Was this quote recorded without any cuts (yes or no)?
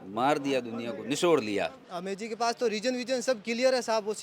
no